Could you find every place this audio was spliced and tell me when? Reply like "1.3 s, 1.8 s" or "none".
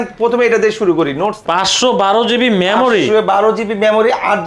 1.4 s